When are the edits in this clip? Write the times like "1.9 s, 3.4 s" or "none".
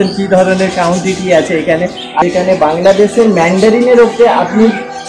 2.2 s